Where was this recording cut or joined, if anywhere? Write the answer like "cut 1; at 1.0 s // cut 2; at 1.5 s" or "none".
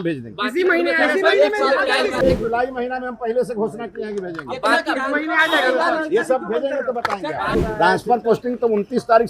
cut 1; at 2.2 s // cut 2; at 7.6 s